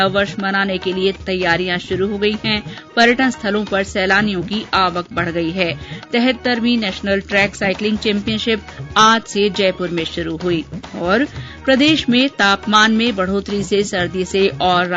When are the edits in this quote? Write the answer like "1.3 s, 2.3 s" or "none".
1.2 s